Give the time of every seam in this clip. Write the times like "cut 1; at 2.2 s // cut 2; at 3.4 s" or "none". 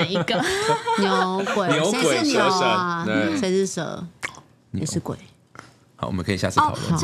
none